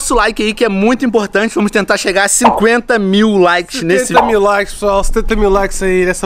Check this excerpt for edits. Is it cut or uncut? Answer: uncut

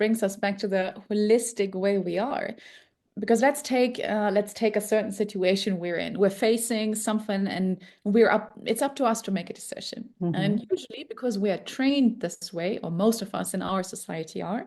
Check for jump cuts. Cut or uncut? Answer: uncut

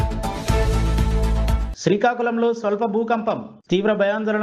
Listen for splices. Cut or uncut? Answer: cut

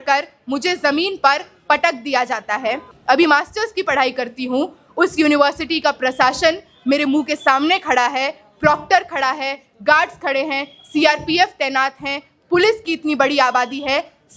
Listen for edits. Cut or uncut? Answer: cut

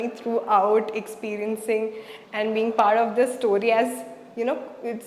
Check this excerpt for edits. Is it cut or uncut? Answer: uncut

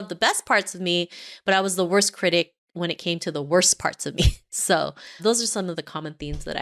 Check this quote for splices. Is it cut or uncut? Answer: uncut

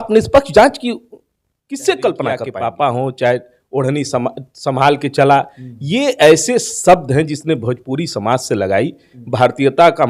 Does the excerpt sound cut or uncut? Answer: cut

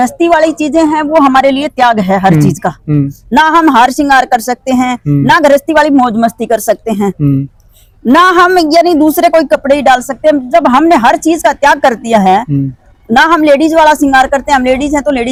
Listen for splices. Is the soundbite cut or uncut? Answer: uncut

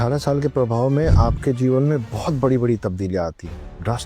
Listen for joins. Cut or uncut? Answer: uncut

